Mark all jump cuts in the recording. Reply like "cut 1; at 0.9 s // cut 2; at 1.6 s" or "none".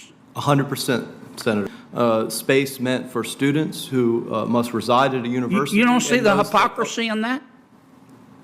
cut 1; at 1.7 s